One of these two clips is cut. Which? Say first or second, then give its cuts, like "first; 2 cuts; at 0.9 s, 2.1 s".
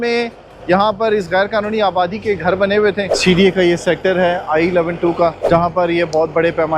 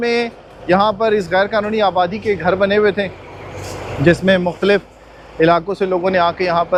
first; 2 cuts; at 3.1 s, 5.4 s